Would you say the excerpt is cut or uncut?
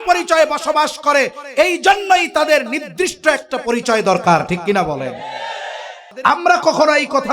cut